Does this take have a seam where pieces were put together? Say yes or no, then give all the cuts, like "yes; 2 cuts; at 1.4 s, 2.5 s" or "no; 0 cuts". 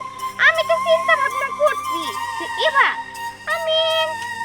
no; 0 cuts